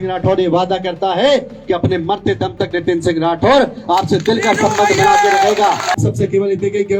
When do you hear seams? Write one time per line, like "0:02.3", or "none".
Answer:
0:05.9